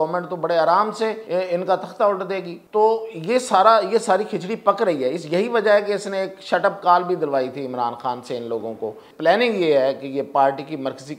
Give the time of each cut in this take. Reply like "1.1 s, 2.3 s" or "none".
1.2 s, 2.5 s, 9.1 s